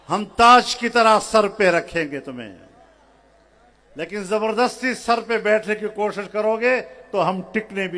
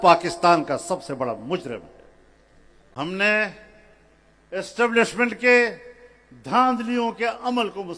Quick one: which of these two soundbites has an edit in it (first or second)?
second